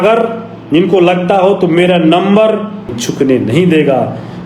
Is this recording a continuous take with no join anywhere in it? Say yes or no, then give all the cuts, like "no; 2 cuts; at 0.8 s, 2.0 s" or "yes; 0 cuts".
no; 1 cut; at 3.0 s